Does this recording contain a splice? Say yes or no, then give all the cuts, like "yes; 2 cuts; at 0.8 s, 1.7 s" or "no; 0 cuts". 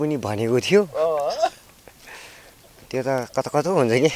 no; 0 cuts